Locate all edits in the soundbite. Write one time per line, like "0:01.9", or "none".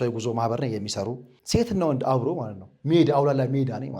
0:01.3